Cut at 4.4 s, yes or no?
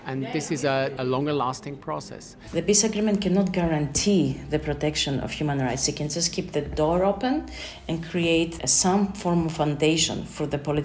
no